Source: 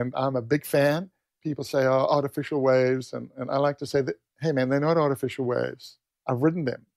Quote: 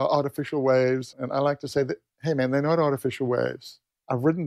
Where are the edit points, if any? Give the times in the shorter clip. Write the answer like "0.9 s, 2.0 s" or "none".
1.1 s